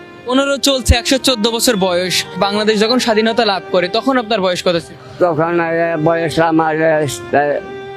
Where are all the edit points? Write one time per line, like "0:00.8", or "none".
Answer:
0:05.0

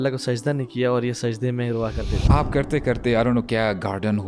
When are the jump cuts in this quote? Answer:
0:02.2

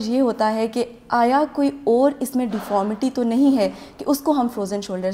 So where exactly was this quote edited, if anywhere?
none

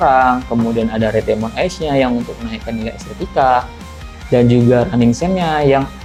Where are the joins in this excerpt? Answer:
none

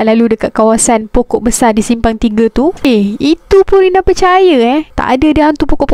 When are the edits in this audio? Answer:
0:02.8
0:04.9

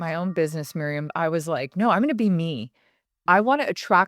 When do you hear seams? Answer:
0:01.1

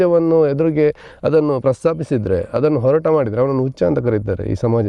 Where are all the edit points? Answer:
none

